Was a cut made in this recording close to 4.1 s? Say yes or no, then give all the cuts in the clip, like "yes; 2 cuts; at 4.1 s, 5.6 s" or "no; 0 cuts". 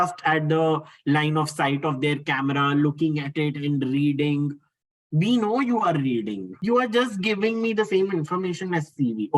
no; 1 cut; at 6.5 s